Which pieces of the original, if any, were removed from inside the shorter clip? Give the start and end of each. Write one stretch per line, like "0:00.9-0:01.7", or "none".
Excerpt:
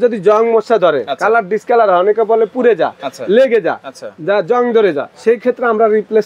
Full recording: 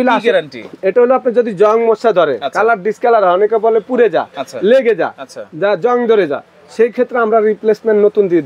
0:06.4-0:06.6